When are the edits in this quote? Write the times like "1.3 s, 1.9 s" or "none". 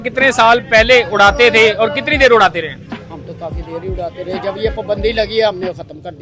none

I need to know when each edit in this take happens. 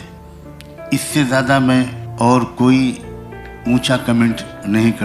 0.9 s, 2.0 s

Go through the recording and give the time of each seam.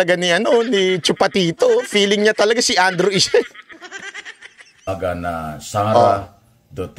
4.9 s

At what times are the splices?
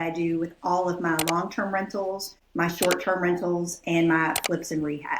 none

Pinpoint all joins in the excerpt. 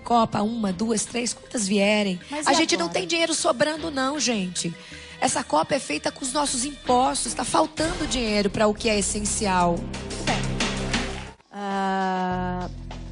3.9 s

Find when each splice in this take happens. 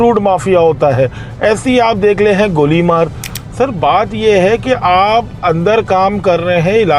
none

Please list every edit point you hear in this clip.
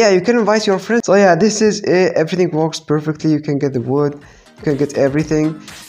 1.0 s

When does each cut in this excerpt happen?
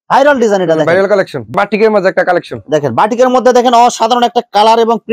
1.5 s

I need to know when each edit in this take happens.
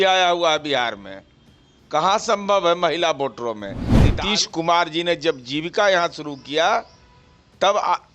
4.1 s

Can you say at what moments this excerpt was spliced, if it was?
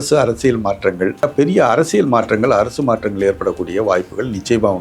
1.2 s

